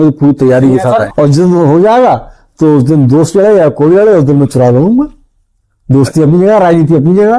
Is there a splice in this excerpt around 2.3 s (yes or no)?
no